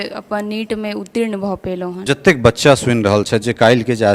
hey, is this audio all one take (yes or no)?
no